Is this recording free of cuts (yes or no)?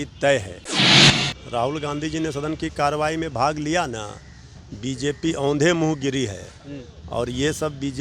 no